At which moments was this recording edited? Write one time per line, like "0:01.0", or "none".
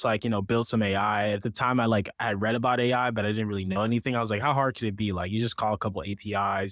none